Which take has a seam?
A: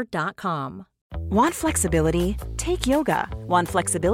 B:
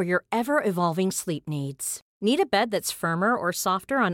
A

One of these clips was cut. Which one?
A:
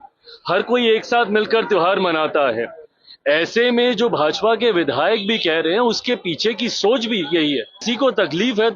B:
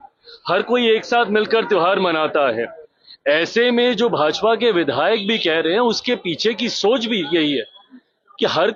A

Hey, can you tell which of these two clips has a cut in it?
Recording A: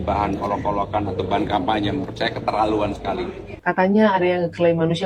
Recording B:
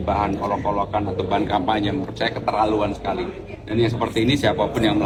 A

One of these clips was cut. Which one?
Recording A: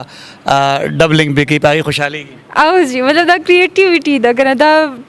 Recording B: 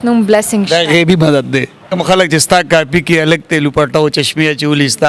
B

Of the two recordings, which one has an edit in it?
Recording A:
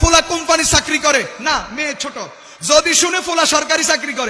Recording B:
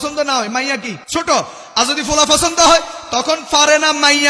B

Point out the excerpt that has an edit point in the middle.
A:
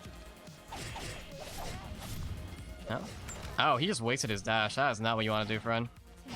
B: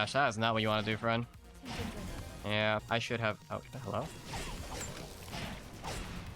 B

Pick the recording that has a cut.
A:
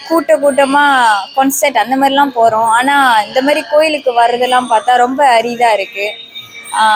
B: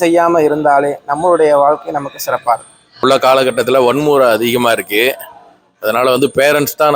B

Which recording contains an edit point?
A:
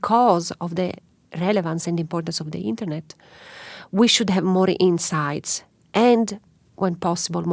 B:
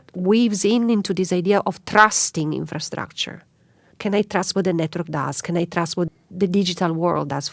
B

